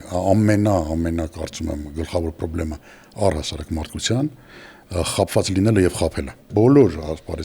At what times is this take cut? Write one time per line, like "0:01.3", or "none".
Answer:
0:06.4